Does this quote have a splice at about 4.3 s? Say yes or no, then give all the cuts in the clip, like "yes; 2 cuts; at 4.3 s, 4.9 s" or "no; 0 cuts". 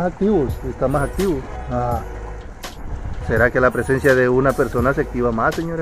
no; 1 cut; at 1.6 s